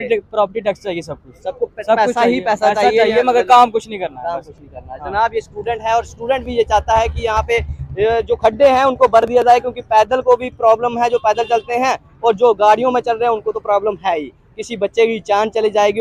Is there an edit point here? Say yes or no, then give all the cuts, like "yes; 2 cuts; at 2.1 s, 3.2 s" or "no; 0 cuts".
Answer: no; 0 cuts